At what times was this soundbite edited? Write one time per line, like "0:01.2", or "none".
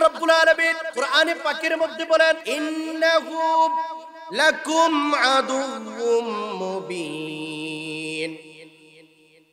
0:00.8
0:02.5

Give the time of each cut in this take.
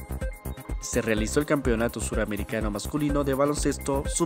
0:00.9

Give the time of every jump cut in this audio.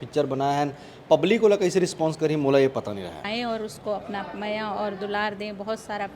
0:03.2

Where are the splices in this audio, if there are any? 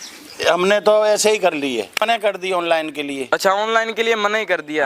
0:02.0

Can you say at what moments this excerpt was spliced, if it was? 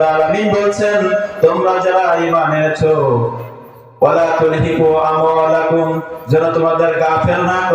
0:03.4

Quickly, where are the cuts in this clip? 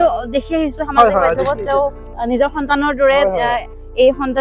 0:02.1

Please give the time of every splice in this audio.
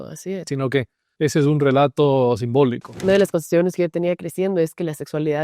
0:01.0
0:02.9

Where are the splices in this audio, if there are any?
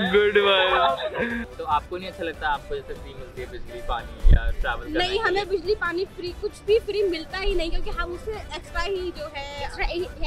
0:01.5

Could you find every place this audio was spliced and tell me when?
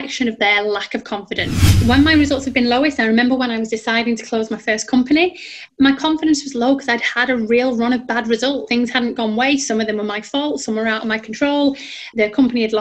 0:01.6

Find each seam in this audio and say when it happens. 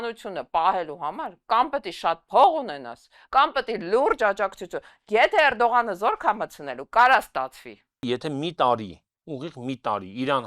0:07.9

